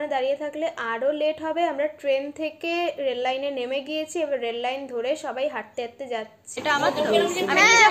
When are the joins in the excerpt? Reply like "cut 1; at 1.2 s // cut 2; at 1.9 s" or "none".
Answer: cut 1; at 6.6 s